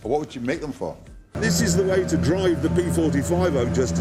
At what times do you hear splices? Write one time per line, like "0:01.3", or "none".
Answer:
none